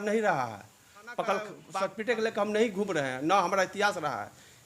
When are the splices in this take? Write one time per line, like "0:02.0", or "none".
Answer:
0:01.6

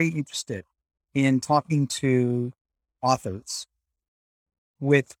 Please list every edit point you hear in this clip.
none

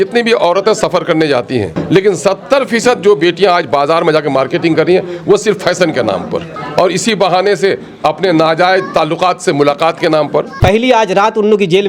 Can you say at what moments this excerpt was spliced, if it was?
0:01.8
0:06.6
0:10.5

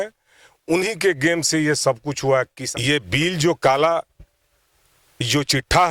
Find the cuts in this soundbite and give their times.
0:02.6

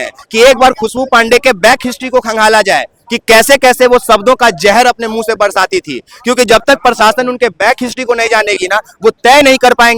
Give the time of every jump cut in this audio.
none

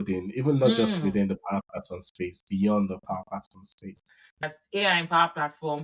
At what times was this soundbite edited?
0:04.4

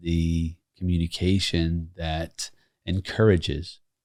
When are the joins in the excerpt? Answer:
none

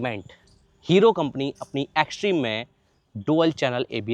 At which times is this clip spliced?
none

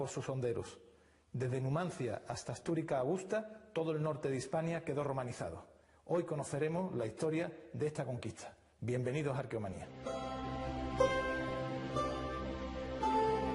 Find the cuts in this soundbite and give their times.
0:08.3

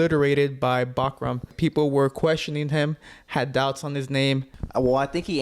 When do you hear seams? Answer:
0:01.5
0:04.6

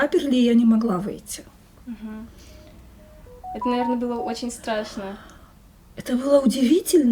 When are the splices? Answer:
none

